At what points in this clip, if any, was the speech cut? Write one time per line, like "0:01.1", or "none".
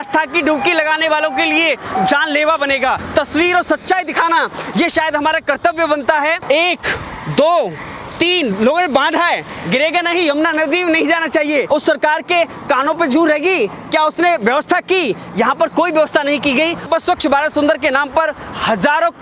0:03.0
0:06.4
0:11.7
0:16.8